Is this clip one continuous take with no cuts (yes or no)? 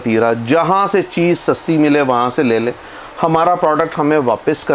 yes